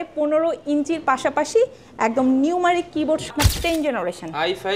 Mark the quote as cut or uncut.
cut